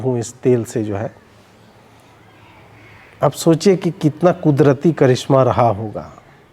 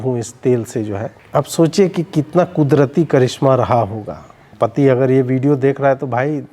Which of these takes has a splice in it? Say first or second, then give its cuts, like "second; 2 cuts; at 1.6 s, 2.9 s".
second; 2 cuts; at 1.2 s, 4.5 s